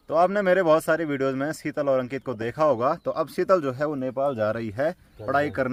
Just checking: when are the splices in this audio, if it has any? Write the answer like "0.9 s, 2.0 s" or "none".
none